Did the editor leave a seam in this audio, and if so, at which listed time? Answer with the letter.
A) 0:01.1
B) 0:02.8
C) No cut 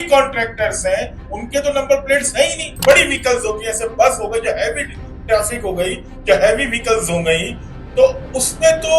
B